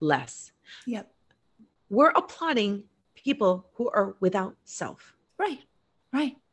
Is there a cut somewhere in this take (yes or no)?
no